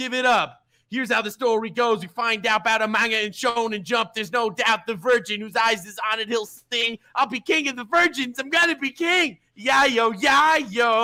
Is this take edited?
no; 0 cuts

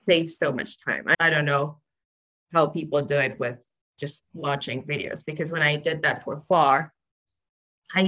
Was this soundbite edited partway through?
yes; 1 cut; at 1.1 s

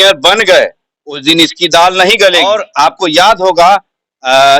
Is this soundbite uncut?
no; 1 cut; at 2.5 s

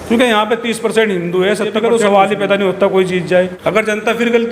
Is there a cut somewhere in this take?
yes; 2 cuts; at 1.8 s, 3.6 s

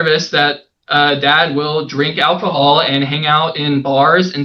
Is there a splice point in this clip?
no; 0 cuts

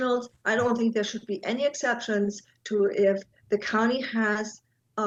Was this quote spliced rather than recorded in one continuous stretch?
no; 0 cuts

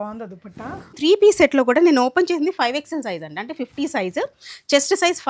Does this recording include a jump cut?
yes; 1 cut; at 1.0 s

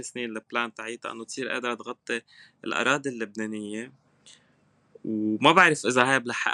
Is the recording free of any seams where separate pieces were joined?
yes; 0 cuts

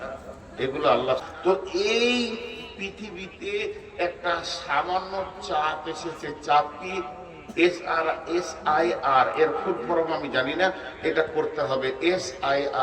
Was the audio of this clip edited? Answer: yes; 1 cut; at 1.2 s

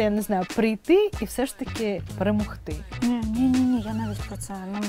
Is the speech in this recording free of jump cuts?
no; 2 cuts; at 2.1 s, 2.9 s

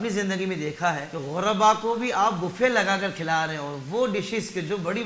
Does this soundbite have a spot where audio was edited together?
yes; 1 cut; at 1.1 s

